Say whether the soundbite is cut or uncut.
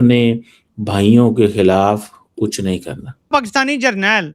cut